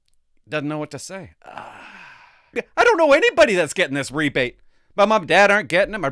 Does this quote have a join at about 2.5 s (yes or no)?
yes